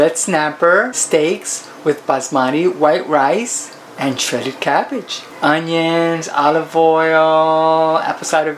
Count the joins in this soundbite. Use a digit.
2